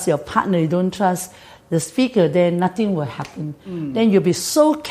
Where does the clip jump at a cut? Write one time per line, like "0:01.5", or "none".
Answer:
none